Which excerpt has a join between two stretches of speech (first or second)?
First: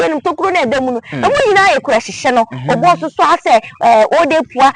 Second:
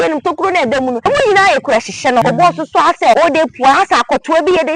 second